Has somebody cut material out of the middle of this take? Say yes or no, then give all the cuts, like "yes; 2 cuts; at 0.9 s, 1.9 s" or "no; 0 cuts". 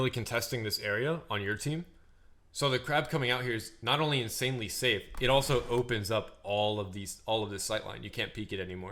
no; 0 cuts